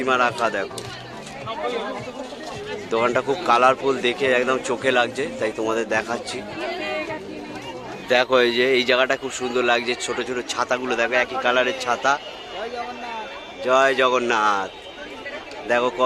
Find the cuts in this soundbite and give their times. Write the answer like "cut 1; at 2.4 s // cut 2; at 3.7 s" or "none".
none

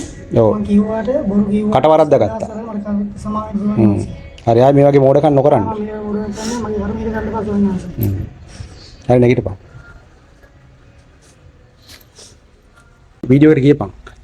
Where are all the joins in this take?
cut 1; at 13.2 s

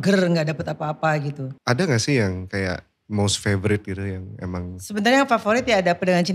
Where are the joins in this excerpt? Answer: cut 1; at 1.5 s // cut 2; at 4.8 s

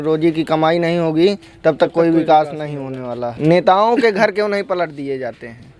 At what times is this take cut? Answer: cut 1; at 3.3 s

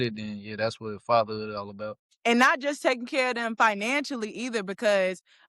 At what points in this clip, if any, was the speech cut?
cut 1; at 2.1 s

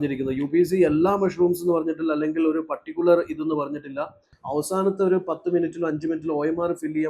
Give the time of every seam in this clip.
cut 1; at 4.3 s

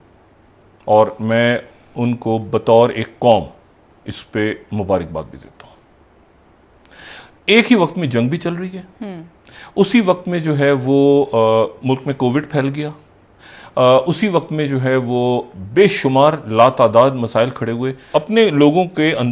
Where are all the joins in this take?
cut 1; at 17.9 s

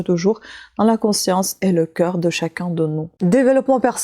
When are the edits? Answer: cut 1; at 3.1 s

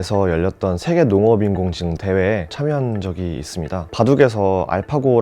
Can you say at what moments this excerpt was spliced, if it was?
none

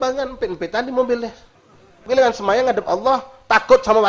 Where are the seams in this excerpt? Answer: cut 1; at 2.0 s

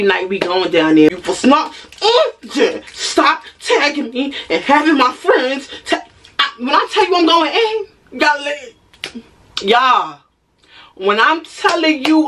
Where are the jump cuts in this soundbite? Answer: cut 1; at 1.1 s

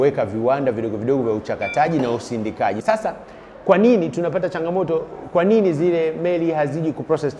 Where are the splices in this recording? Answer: cut 1; at 2.8 s

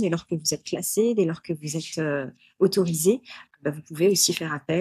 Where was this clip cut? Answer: none

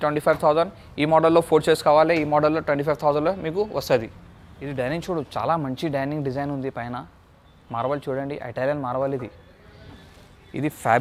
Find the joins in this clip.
none

